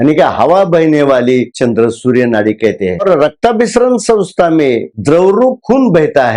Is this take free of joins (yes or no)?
no